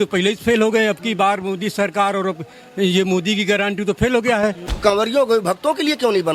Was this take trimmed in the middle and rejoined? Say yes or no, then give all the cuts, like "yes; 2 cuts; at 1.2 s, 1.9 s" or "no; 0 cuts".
yes; 1 cut; at 4.7 s